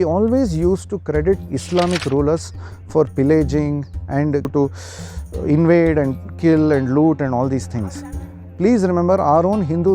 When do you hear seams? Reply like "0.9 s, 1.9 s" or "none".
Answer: 4.5 s